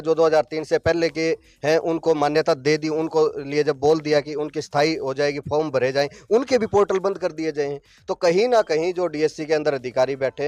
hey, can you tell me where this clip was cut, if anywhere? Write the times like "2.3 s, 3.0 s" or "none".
none